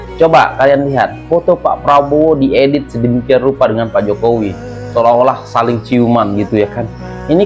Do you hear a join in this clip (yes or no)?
no